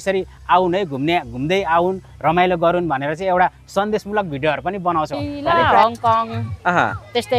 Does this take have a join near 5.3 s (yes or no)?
yes